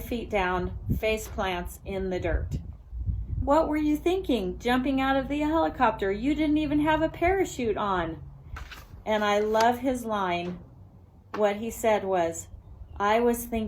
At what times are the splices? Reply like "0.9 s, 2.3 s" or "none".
3.4 s